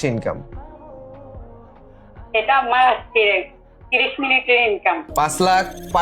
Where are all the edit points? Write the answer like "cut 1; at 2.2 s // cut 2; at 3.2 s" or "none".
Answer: cut 1; at 5.1 s